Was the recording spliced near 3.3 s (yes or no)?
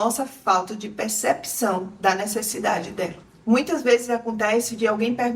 yes